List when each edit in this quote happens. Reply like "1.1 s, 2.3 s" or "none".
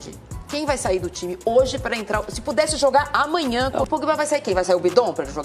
3.9 s